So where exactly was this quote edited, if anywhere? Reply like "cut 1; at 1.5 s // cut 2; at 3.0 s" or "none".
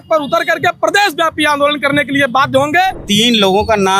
cut 1; at 3.0 s